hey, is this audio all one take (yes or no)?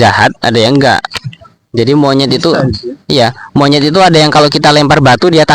yes